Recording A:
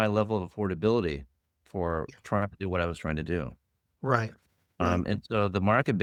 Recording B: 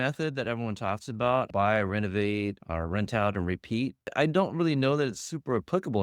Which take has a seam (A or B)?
B